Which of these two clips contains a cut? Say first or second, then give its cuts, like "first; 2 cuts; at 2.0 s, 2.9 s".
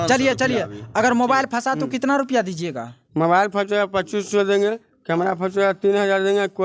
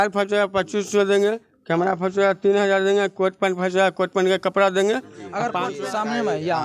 second; 1 cut; at 5.7 s